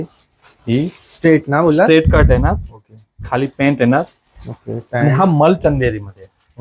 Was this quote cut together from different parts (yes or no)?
no